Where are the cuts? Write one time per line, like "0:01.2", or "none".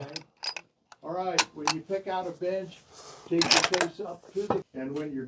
0:04.2